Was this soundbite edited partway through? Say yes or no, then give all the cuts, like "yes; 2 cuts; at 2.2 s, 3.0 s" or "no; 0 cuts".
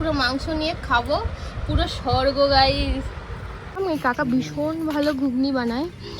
yes; 1 cut; at 3.8 s